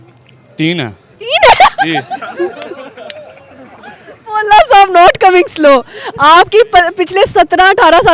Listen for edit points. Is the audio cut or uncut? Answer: uncut